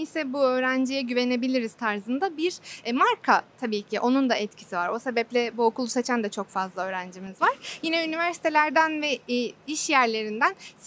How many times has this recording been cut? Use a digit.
0